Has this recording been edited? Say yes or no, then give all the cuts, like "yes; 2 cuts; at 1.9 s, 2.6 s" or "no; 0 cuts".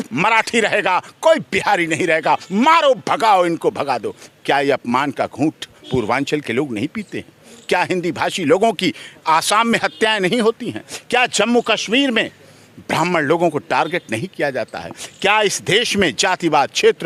no; 0 cuts